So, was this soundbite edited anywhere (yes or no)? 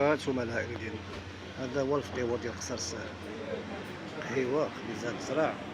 no